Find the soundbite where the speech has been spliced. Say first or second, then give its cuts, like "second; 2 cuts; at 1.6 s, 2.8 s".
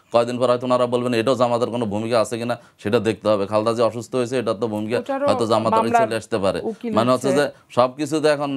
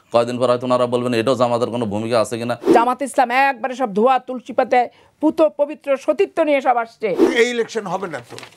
second; 2 cuts; at 2.7 s, 7.3 s